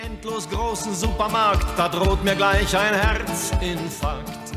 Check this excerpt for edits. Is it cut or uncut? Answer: uncut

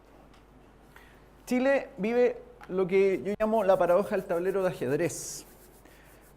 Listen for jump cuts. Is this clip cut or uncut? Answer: cut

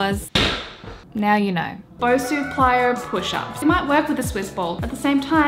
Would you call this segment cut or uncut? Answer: cut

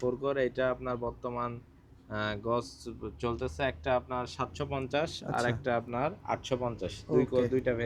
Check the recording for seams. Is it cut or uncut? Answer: uncut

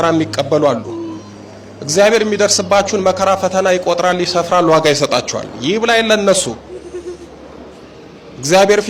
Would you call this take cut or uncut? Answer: uncut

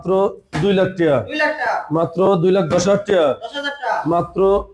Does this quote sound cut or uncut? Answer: uncut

